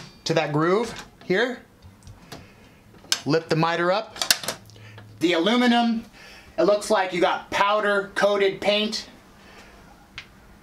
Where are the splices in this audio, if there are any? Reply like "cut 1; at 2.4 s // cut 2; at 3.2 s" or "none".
cut 1; at 5.1 s